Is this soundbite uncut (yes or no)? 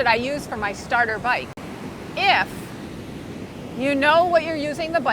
no